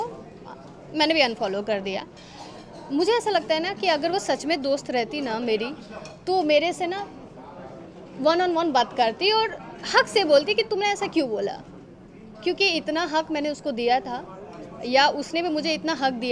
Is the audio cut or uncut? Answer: uncut